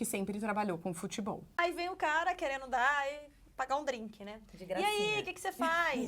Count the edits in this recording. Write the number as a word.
one